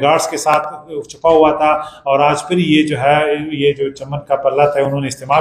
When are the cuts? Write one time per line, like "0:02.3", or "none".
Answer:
none